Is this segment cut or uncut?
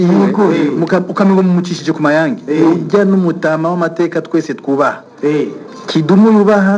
uncut